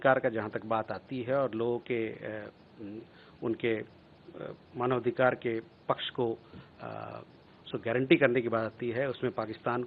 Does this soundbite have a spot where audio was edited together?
no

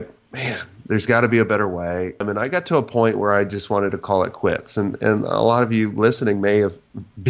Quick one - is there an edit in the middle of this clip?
yes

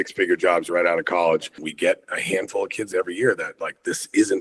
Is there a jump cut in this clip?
yes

